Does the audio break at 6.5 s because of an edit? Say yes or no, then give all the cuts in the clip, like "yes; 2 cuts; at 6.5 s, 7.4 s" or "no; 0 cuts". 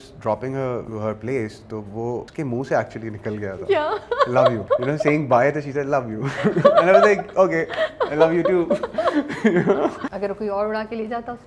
no; 4 cuts; at 0.9 s, 2.3 s, 4.6 s, 10.1 s